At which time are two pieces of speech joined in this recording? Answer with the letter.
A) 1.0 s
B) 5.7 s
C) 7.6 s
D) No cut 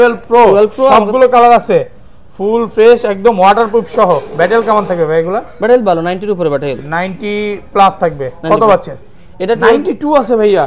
D